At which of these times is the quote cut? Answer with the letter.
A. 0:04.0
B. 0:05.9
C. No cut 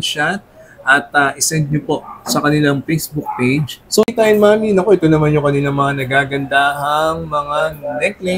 A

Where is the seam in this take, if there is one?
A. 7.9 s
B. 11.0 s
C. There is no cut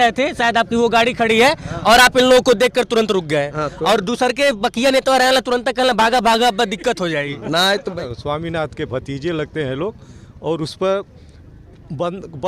A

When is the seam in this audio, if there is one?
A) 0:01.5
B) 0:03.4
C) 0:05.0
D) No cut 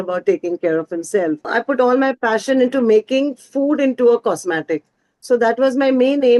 A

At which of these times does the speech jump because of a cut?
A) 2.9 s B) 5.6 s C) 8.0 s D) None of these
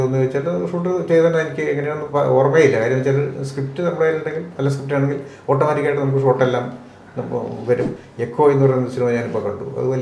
C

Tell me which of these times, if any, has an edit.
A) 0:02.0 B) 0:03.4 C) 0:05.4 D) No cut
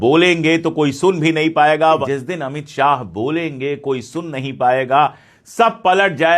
A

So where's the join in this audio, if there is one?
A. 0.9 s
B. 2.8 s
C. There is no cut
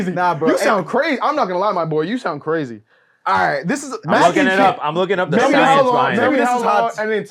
C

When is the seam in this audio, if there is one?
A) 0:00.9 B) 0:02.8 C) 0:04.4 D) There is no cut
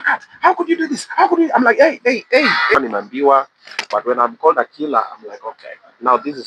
B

